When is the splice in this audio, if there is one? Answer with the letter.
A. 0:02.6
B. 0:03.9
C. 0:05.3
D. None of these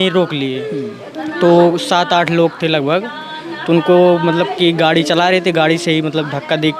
D